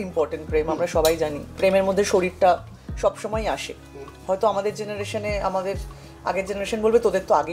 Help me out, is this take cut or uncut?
cut